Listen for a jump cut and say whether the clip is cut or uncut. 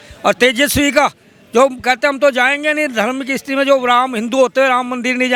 uncut